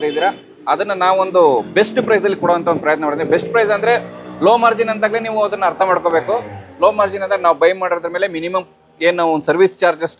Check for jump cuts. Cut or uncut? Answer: uncut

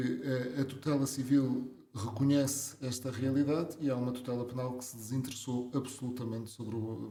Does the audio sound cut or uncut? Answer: uncut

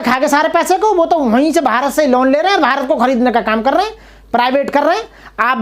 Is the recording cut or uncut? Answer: uncut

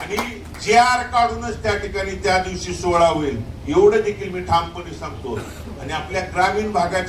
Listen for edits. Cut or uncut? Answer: uncut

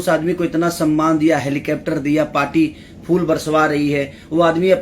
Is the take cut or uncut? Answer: uncut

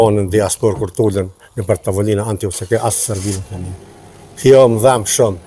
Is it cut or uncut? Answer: uncut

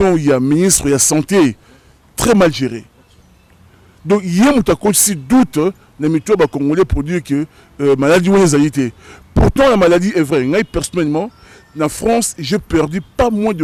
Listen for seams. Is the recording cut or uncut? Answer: uncut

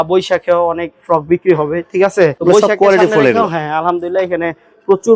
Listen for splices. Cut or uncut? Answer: uncut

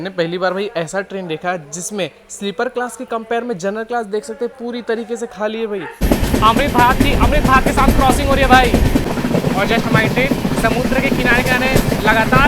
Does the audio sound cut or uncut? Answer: cut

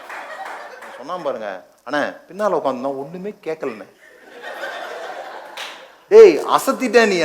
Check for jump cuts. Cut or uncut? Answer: cut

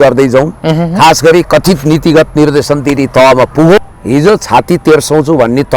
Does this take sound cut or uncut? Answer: cut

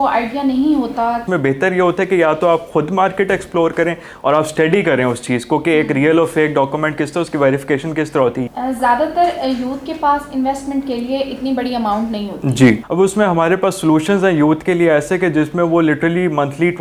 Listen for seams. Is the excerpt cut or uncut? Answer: cut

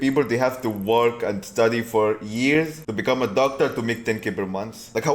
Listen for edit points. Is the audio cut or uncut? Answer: cut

